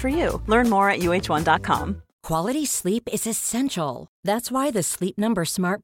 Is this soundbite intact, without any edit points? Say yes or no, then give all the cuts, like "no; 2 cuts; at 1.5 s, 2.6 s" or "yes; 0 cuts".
no; 1 cut; at 2.1 s